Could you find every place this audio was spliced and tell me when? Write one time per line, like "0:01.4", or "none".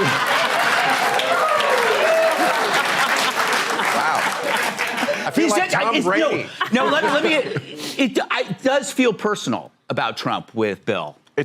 0:06.6